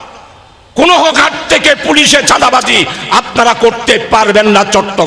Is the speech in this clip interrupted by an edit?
no; 0 cuts

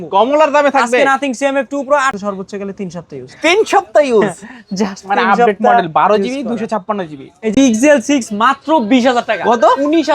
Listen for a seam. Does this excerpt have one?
yes; 2 cuts; at 2.2 s, 7.5 s

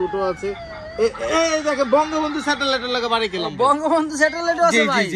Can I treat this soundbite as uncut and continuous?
yes; 0 cuts

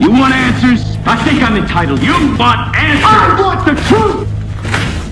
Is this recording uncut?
yes; 0 cuts

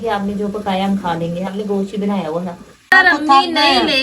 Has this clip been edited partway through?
yes; 1 cut; at 2.9 s

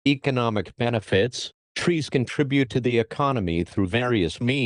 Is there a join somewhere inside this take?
yes; 1 cut; at 1.0 s

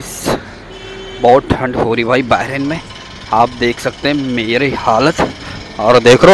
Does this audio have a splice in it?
no; 0 cuts

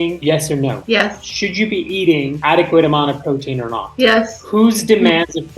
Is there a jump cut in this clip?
yes; 3 cuts; at 0.9 s, 2.3 s, 4.4 s

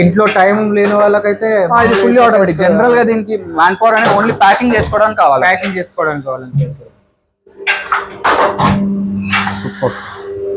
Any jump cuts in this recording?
no; 0 cuts

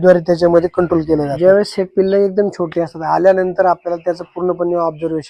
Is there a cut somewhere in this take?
yes; 1 cut; at 1.3 s

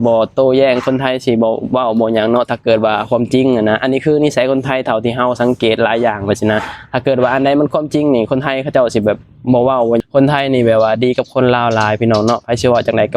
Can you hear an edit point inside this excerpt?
yes; 1 cut; at 10.0 s

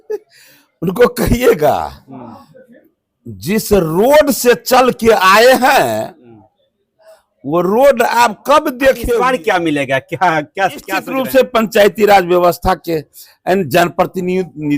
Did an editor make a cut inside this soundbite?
yes; 2 cuts; at 9.0 s, 11.1 s

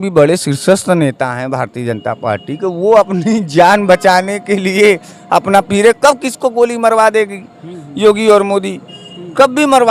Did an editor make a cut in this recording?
no; 0 cuts

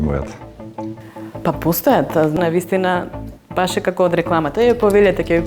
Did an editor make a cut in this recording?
yes; 1 cut; at 2.4 s

